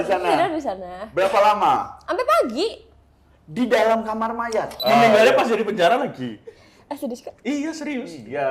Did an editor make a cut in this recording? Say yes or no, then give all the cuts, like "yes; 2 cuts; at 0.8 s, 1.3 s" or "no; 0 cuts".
yes; 1 cut; at 4.8 s